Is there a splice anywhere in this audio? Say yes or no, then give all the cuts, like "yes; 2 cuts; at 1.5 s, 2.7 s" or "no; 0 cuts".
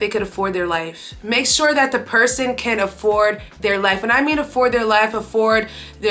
no; 0 cuts